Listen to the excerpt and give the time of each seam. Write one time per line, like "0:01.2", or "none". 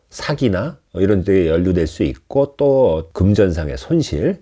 0:03.1